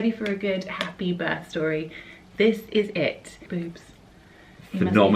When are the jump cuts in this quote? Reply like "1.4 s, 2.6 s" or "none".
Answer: 3.4 s